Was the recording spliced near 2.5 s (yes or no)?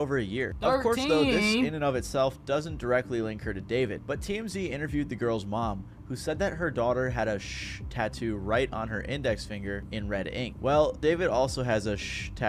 no